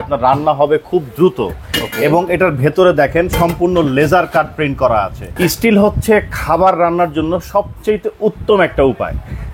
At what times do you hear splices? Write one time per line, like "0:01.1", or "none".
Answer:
0:05.3

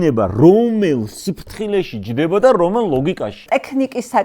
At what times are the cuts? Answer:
0:03.4

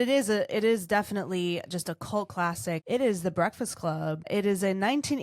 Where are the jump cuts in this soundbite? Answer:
0:02.8
0:04.3

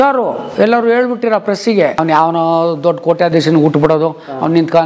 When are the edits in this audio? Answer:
0:02.0

